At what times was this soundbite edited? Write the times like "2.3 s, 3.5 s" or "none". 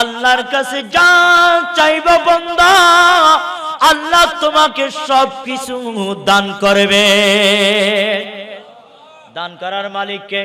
none